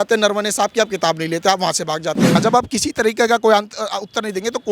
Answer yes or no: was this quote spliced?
yes